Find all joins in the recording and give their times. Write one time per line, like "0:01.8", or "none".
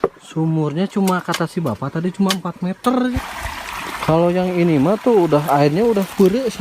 0:03.1